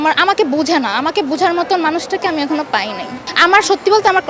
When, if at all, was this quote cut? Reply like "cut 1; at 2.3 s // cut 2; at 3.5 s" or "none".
cut 1; at 3.3 s